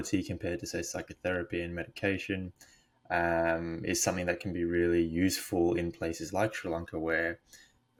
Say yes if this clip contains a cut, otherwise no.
no